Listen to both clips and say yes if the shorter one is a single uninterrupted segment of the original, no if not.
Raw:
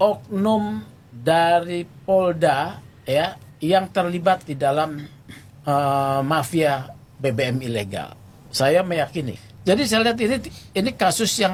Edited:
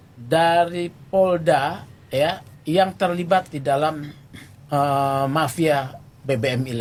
yes